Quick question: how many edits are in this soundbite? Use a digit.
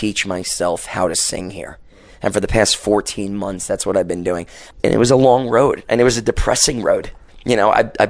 2